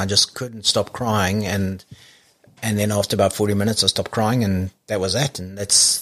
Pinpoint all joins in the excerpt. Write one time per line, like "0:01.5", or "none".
none